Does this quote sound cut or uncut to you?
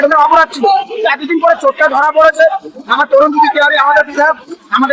uncut